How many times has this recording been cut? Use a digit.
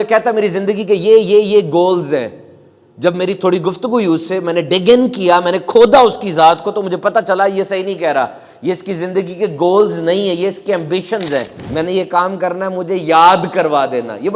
1